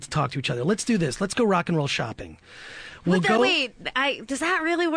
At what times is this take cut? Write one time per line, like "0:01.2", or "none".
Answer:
none